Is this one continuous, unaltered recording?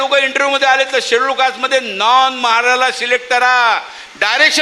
yes; 0 cuts

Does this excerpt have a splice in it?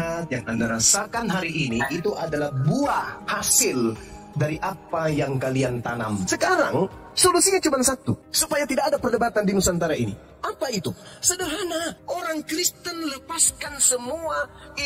yes; 1 cut; at 6.2 s

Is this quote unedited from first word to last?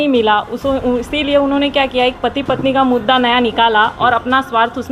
yes; 0 cuts

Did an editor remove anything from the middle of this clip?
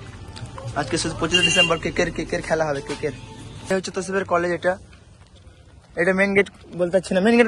yes; 1 cut; at 3.7 s

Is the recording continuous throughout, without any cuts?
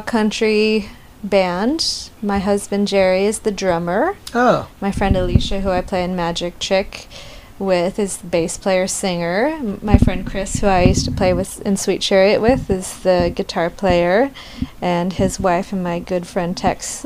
yes; 0 cuts

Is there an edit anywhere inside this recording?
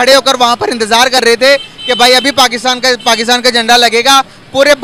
no; 0 cuts

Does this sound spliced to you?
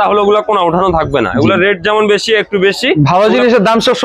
no; 0 cuts

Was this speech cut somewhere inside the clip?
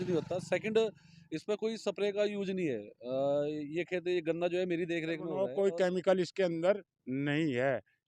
yes; 1 cut; at 5.4 s

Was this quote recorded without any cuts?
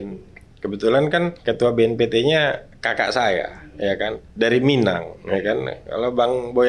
no; 1 cut; at 1.4 s

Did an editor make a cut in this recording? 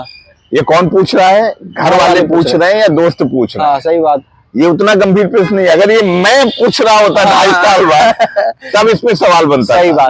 no; 0 cuts

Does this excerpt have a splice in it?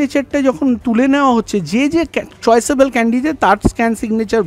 no; 0 cuts

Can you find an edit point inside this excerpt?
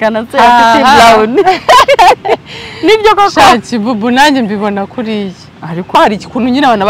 yes; 1 cut; at 6.0 s

